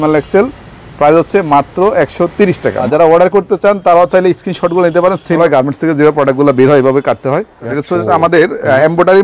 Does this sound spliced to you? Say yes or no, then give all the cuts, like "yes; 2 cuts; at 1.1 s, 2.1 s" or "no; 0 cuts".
yes; 3 cuts; at 2.9 s, 5.4 s, 7.8 s